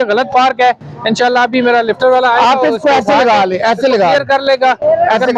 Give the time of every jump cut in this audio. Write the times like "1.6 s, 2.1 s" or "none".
none